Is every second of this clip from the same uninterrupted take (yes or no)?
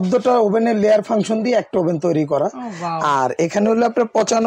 yes